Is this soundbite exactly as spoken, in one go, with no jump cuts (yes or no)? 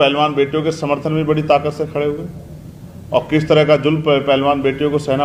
yes